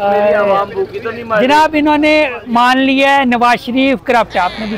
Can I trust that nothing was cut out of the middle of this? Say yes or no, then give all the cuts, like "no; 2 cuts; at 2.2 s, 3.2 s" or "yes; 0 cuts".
yes; 0 cuts